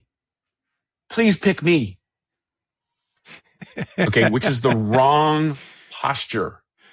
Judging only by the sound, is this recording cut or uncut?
uncut